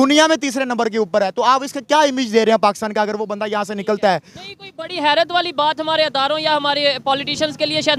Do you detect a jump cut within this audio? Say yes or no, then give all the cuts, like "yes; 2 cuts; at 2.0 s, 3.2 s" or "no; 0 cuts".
no; 0 cuts